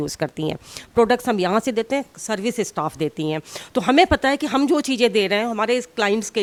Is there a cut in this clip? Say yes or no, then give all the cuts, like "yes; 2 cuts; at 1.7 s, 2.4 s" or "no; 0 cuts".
no; 0 cuts